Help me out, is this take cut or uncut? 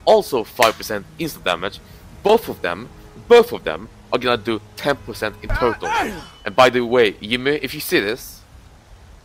uncut